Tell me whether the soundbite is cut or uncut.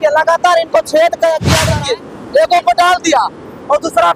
cut